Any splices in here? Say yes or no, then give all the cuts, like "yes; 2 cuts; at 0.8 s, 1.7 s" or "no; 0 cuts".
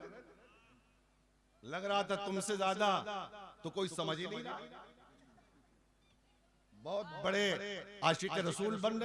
no; 0 cuts